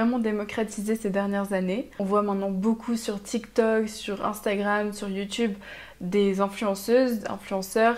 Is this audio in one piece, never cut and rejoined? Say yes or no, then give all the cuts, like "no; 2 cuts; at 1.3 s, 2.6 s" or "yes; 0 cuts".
yes; 0 cuts